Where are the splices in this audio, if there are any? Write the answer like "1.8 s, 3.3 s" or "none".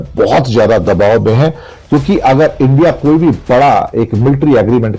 none